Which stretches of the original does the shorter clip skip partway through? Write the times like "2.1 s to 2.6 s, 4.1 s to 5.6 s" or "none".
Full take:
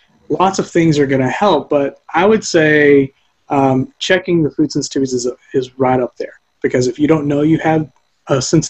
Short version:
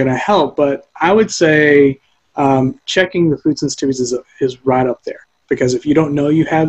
none